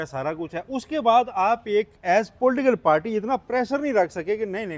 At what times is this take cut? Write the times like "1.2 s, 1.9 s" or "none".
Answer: none